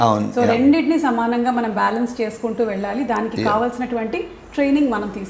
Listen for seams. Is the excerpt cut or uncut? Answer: uncut